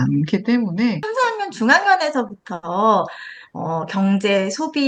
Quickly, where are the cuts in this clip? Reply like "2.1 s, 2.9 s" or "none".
1.1 s